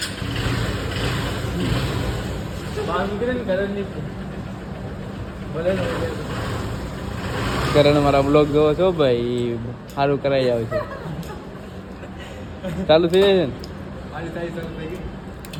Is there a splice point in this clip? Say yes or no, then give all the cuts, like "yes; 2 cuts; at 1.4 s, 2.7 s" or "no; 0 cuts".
no; 0 cuts